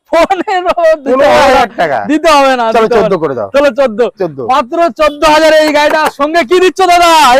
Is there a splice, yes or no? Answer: no